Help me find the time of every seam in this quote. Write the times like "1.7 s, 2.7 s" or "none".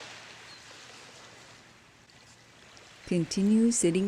3.0 s